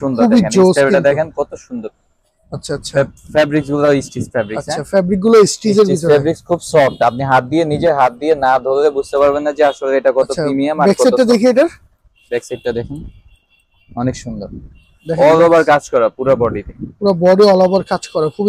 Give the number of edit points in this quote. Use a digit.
0